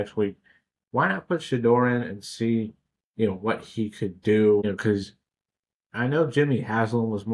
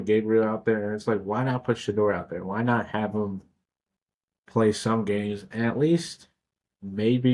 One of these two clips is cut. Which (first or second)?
first